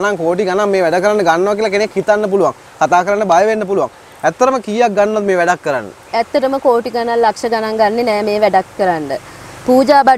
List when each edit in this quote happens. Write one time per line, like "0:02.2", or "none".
none